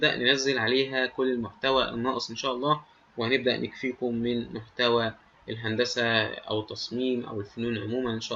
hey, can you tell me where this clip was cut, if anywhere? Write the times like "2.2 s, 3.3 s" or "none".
none